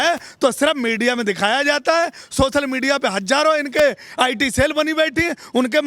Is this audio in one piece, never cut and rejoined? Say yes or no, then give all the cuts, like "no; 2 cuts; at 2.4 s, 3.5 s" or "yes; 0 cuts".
yes; 0 cuts